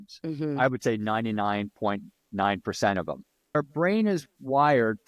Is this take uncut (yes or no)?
no